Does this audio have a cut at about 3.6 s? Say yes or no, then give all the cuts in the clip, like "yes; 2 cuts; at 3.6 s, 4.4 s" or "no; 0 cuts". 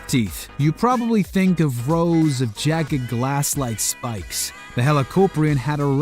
no; 1 cut; at 1.9 s